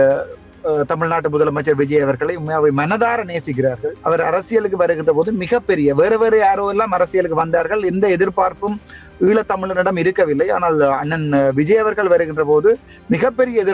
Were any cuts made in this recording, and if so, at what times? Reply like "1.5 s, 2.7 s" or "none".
4.0 s